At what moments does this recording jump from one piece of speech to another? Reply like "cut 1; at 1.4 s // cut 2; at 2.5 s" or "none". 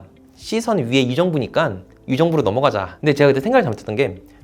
cut 1; at 2.9 s

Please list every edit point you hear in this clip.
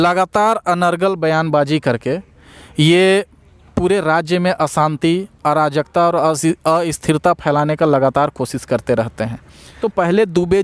cut 1; at 9.6 s

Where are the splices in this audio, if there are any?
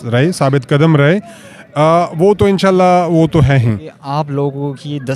cut 1; at 4.0 s

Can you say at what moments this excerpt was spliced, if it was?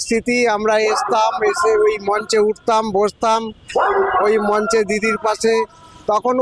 none

